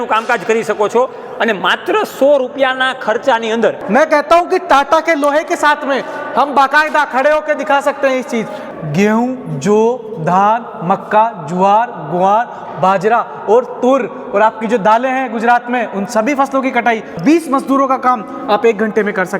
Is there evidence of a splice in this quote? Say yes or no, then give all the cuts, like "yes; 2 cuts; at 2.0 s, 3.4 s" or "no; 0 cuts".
yes; 3 cuts; at 3.8 s, 8.6 s, 17.2 s